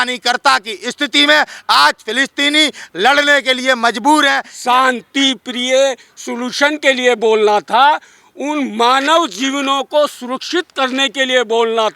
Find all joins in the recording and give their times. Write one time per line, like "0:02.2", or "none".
0:04.5